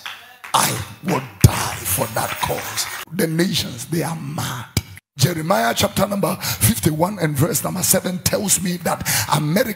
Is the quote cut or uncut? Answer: cut